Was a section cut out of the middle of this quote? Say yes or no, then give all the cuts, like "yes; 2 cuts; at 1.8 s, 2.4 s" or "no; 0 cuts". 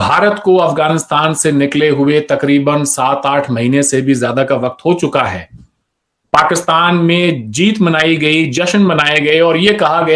no; 0 cuts